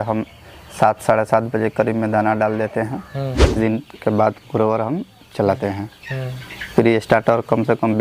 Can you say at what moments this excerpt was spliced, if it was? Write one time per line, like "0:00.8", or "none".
0:03.6